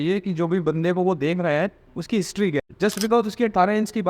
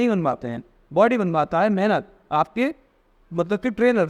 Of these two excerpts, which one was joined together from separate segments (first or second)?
first